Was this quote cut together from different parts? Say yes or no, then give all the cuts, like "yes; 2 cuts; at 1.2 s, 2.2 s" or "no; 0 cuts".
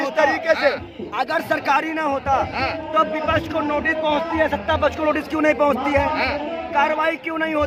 no; 0 cuts